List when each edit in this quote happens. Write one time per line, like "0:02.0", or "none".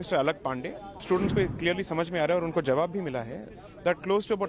0:01.0